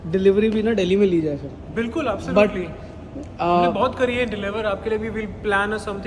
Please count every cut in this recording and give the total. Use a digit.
0